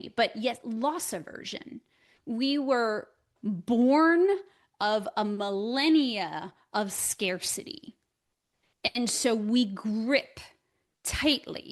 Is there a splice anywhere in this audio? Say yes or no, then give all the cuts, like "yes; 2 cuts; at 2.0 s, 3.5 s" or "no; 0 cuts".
yes; 2 cuts; at 2.1 s, 3.3 s